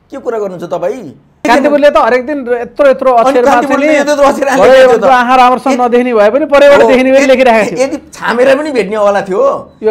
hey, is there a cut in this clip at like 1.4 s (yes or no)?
yes